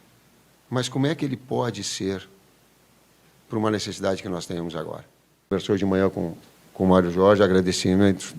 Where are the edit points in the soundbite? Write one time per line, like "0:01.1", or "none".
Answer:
0:05.5